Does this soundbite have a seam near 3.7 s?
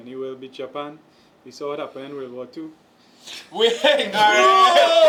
no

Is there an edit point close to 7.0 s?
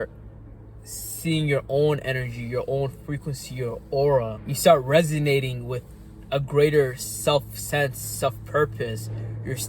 no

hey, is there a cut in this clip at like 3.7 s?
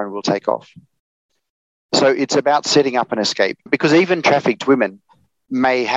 yes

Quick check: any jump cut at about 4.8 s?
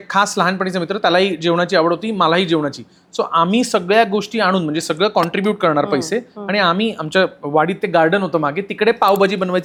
no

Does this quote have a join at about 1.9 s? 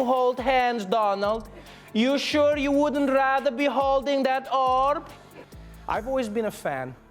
no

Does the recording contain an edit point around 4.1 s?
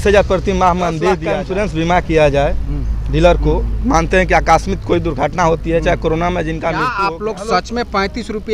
no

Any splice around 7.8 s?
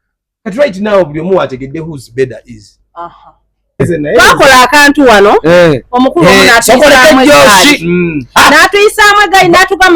no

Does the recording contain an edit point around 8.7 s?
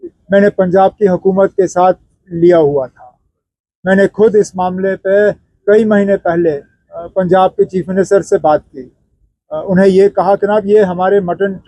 no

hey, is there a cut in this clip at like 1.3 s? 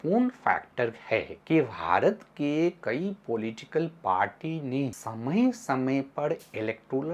yes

